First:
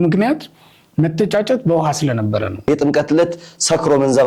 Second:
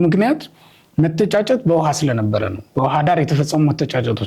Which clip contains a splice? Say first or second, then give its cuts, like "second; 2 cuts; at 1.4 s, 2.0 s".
first; 1 cut; at 2.7 s